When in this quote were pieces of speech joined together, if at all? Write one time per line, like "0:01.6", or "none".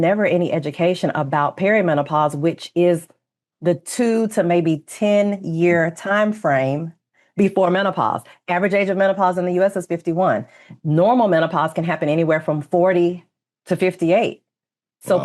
none